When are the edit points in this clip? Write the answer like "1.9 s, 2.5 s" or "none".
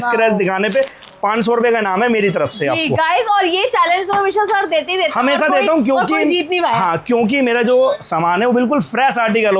none